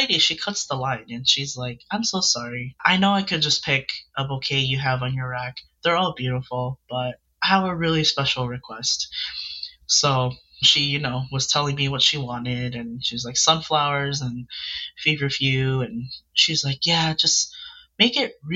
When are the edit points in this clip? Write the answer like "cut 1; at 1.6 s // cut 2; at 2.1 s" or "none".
cut 1; at 2.8 s